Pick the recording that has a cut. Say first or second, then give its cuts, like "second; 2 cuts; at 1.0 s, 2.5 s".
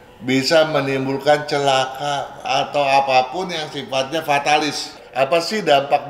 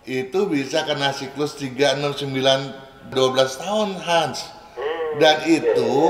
first; 2 cuts; at 2.4 s, 5.0 s